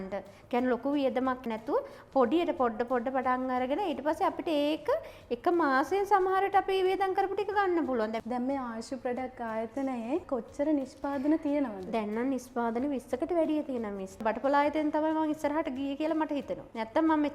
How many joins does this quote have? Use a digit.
2